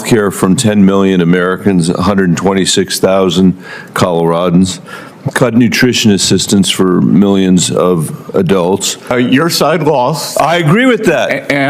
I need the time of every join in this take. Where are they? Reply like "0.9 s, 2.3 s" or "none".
9.0 s